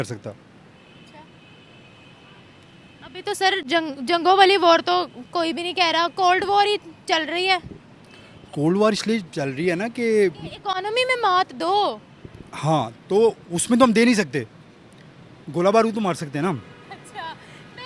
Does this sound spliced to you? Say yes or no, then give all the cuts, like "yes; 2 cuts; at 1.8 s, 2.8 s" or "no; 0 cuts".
no; 0 cuts